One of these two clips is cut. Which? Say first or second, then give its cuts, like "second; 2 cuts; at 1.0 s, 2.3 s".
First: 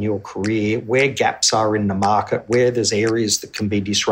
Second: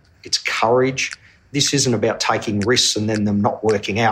second; 1 cut; at 1.3 s